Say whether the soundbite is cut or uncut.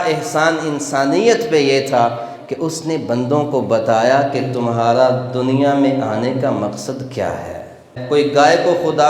cut